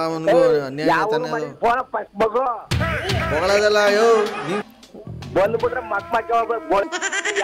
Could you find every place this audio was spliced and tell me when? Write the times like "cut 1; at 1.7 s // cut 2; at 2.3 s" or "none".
cut 1; at 4.6 s